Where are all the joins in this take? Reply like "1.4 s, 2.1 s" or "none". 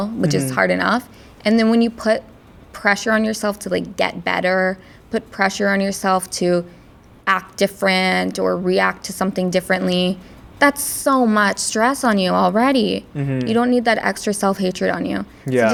none